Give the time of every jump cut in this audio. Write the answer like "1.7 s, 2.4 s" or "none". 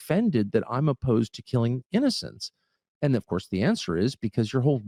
none